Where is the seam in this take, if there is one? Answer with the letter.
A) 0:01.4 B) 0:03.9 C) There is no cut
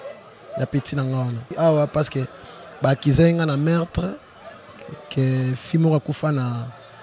A